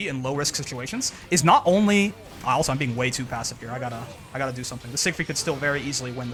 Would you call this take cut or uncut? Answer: uncut